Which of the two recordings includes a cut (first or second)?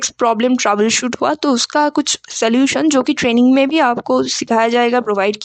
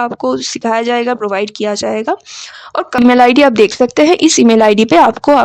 second